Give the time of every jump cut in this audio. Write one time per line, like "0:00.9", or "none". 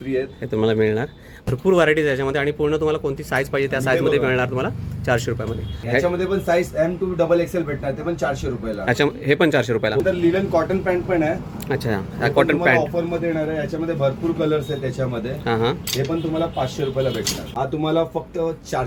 0:01.4
0:05.8
0:10.0
0:17.4